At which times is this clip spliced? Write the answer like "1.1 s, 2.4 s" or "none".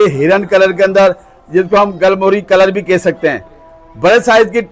none

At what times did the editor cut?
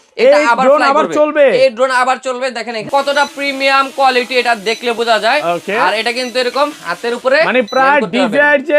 2.9 s

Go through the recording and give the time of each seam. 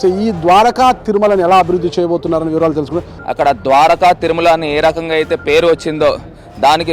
3.1 s

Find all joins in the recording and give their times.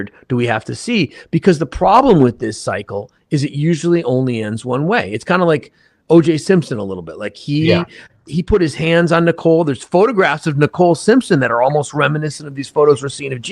5.1 s

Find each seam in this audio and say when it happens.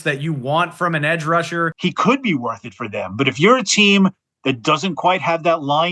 1.7 s

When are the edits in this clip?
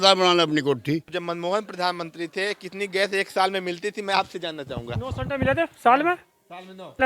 1.1 s

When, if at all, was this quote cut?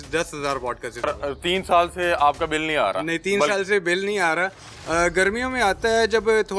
1.1 s

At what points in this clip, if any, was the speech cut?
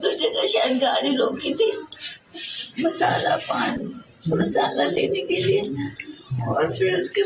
none

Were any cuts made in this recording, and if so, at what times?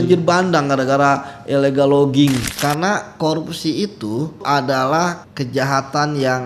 2.5 s, 4.4 s, 5.3 s

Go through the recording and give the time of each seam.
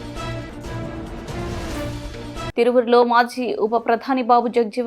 none

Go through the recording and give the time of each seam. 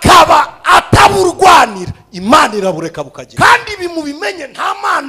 3.2 s

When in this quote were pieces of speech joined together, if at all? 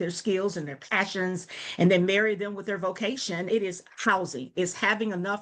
3.4 s

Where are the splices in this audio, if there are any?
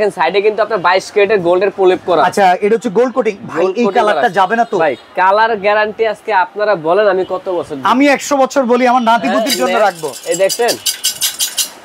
none

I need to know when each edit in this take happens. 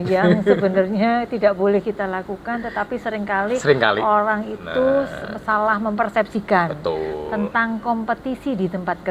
none

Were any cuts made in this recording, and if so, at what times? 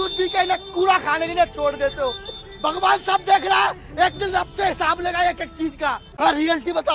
none

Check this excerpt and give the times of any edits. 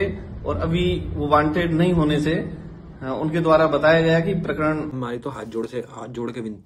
4.9 s

